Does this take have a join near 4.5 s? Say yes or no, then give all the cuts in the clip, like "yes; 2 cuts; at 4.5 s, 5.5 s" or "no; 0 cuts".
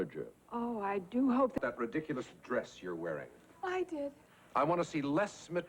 no; 1 cut; at 1.6 s